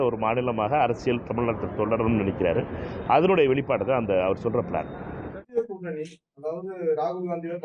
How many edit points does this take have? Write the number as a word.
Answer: zero